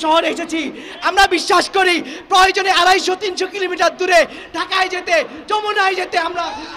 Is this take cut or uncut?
uncut